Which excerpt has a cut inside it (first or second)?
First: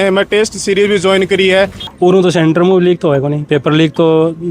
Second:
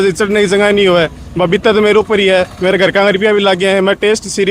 first